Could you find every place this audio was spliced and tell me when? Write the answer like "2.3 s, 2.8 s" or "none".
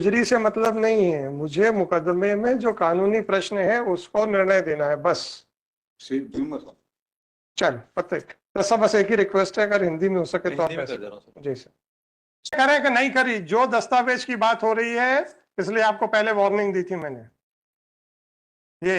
12.6 s